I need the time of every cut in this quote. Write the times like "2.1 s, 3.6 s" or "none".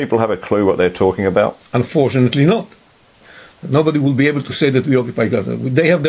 1.6 s, 3.1 s